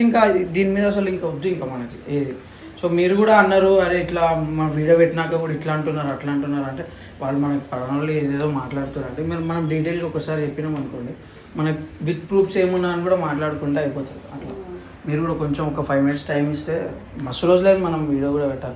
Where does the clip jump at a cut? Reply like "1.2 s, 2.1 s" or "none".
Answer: none